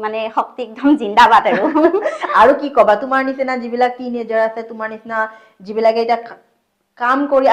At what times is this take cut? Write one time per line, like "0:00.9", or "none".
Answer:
none